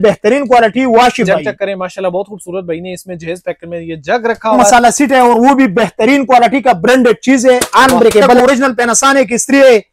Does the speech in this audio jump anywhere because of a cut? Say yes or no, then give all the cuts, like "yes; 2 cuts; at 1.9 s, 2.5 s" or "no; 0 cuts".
yes; 3 cuts; at 1.3 s, 4.6 s, 8.4 s